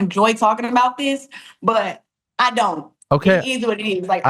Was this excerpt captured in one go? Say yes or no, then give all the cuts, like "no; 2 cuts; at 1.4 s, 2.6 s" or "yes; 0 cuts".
yes; 0 cuts